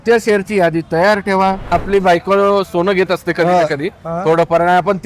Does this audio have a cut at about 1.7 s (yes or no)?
yes